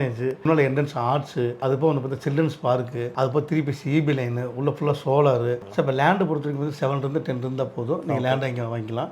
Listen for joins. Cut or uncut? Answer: cut